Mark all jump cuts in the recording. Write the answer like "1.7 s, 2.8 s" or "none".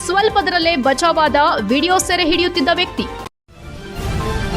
3.3 s